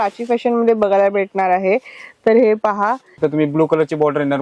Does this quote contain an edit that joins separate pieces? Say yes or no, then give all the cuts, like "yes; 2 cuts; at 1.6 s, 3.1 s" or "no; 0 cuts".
yes; 1 cut; at 3.1 s